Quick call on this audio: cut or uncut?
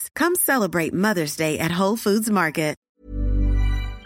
cut